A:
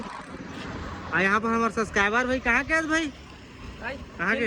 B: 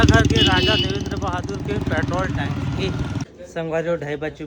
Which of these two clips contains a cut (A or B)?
B